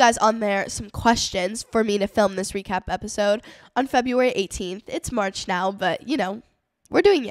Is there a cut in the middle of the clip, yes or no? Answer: no